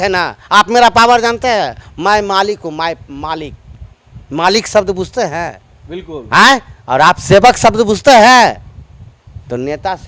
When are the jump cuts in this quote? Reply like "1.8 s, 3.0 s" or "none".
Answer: none